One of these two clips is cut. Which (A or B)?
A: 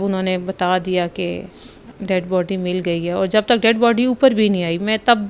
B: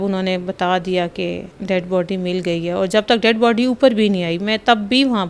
B